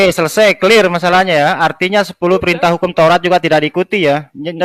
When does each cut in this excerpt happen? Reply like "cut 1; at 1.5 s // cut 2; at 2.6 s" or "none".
none